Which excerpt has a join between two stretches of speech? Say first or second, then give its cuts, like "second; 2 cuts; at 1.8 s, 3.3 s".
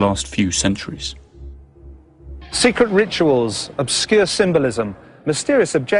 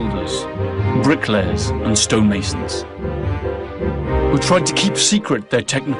second; 1 cut; at 5.0 s